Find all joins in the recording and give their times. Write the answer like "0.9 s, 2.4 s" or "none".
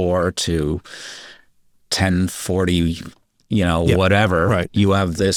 none